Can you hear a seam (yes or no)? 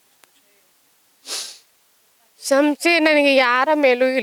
no